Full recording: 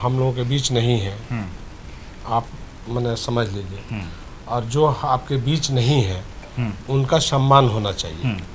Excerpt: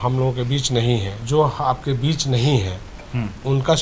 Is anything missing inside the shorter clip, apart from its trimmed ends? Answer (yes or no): yes